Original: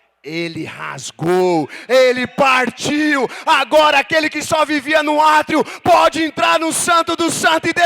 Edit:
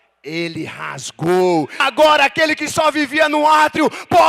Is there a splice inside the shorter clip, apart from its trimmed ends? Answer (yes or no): yes